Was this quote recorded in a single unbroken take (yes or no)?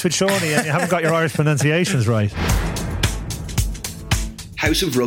no